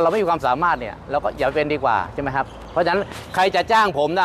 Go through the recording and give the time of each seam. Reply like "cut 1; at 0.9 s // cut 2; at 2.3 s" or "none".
none

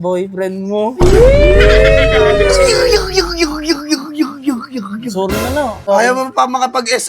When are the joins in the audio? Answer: cut 1; at 5.8 s

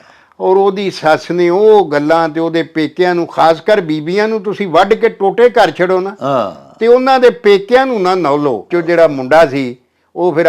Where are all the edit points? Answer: cut 1; at 8.7 s

